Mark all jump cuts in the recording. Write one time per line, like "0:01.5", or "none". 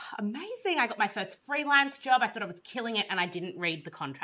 none